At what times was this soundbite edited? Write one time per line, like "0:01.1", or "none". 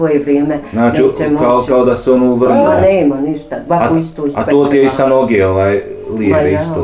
none